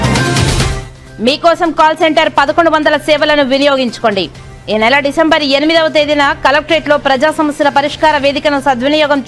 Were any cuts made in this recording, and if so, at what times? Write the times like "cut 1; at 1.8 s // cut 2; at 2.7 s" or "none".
cut 1; at 0.9 s